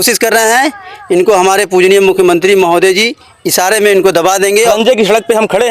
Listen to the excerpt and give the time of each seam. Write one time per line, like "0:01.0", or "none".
0:04.7